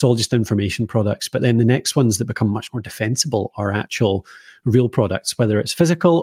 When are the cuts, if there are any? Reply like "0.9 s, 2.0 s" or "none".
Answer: none